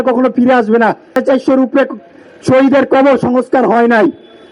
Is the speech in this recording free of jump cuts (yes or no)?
no